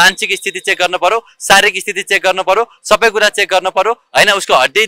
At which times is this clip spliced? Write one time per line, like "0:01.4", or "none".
none